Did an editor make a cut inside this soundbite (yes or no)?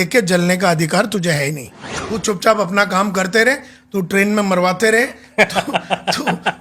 yes